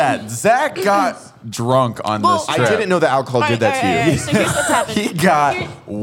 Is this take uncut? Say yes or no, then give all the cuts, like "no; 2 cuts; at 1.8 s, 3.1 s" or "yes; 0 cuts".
yes; 0 cuts